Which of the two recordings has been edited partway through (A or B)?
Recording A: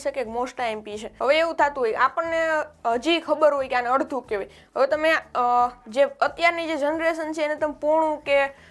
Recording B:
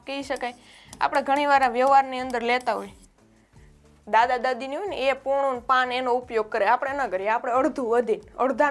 A